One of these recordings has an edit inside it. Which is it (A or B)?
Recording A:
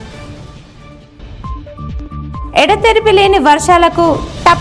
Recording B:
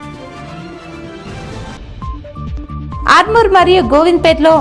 A